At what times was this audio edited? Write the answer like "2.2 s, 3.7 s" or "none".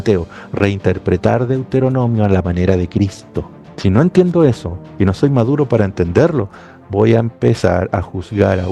none